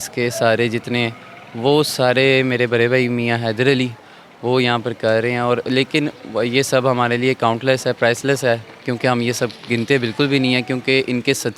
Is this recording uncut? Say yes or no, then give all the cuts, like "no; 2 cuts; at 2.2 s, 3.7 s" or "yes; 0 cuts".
yes; 0 cuts